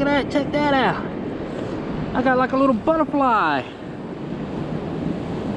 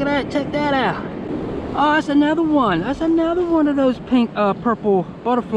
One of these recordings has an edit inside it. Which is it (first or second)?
second